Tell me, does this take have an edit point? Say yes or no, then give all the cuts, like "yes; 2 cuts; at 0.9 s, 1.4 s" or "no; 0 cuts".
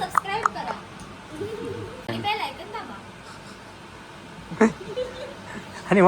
yes; 1 cut; at 2.0 s